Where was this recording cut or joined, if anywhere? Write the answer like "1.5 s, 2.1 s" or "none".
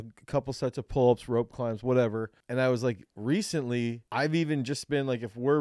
2.4 s, 4.0 s